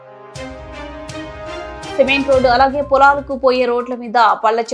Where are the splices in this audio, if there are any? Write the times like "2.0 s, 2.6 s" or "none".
2.0 s